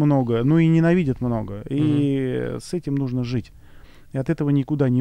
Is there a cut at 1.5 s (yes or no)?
no